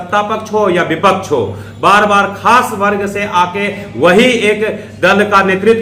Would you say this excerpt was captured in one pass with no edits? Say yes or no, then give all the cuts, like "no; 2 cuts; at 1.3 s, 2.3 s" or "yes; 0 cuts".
yes; 0 cuts